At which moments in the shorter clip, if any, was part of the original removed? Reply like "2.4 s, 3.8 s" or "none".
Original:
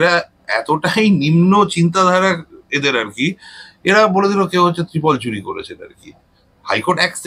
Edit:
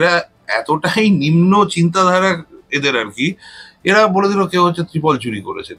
none

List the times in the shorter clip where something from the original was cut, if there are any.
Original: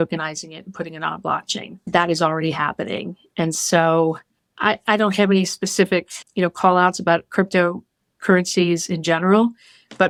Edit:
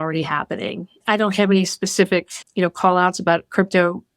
1.0 s

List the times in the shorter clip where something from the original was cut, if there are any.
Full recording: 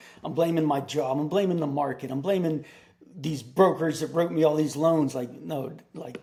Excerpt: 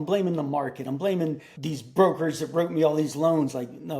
1.5 s

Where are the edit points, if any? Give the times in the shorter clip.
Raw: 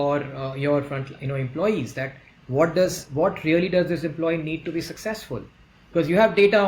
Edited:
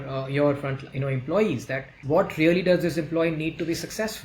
2.0 s

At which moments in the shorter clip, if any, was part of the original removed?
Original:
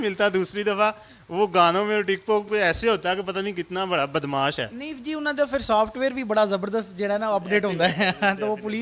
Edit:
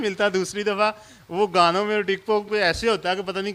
none

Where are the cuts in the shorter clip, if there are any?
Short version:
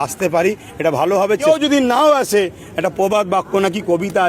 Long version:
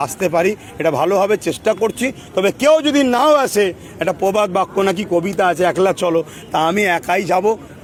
1.4 s

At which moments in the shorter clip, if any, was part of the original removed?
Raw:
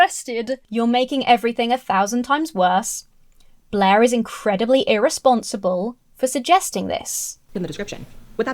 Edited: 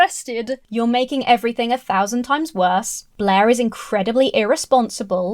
3.0 s

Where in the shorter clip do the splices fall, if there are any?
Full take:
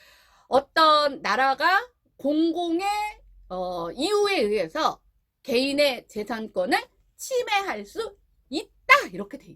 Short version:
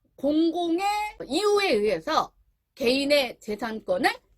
1.2 s

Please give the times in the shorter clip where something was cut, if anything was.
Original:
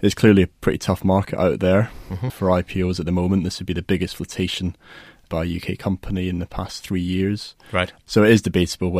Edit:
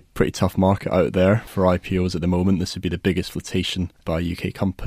1.5 s, 4.0 s

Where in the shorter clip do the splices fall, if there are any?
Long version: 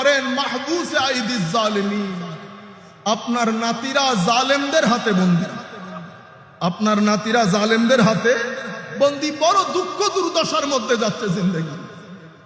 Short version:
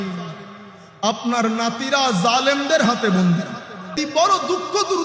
3.9 s

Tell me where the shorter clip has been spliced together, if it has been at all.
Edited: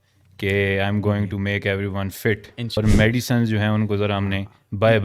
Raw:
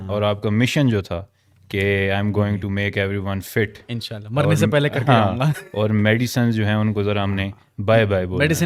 2.8 s

